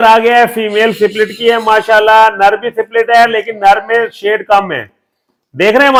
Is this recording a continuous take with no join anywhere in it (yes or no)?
yes